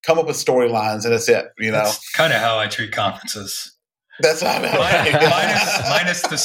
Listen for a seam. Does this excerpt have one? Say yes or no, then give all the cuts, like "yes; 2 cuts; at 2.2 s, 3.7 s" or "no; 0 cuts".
no; 0 cuts